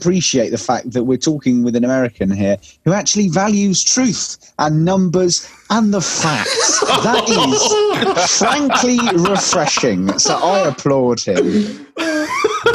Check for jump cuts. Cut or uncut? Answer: uncut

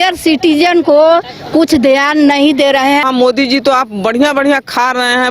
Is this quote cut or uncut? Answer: cut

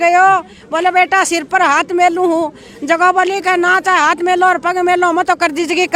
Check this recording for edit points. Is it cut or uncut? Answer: uncut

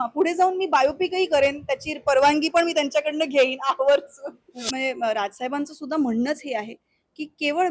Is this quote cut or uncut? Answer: cut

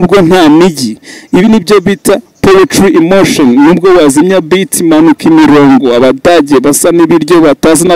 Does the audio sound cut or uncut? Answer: uncut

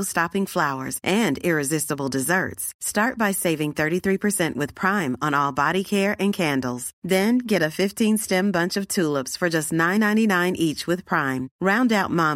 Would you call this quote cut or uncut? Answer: uncut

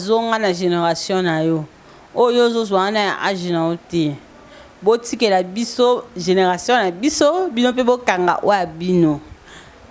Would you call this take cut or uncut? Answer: uncut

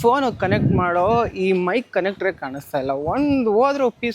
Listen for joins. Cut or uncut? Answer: uncut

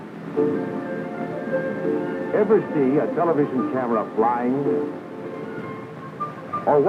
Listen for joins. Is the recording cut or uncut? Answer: uncut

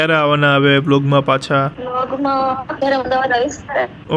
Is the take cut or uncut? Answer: uncut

